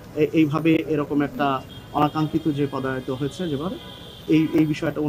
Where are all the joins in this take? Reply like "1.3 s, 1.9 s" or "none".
none